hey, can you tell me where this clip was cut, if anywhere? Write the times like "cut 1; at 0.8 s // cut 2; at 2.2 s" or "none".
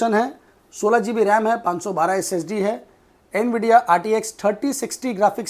none